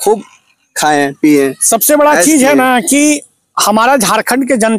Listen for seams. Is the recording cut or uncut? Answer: uncut